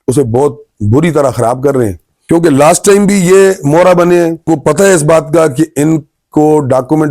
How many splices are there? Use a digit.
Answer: 2